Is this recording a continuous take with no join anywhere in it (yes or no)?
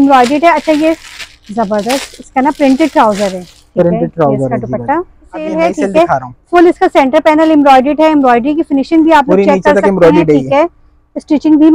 no